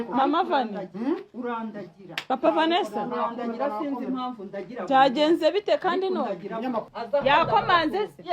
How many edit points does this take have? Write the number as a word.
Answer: one